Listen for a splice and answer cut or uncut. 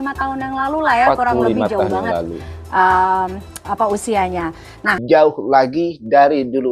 cut